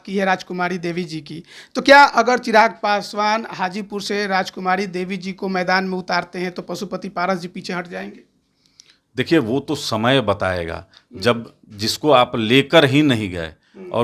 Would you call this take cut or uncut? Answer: uncut